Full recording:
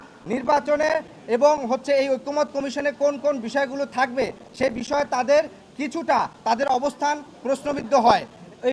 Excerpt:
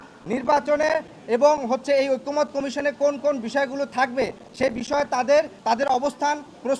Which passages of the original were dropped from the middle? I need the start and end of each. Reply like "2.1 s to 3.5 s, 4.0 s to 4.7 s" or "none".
5.6 s to 6.4 s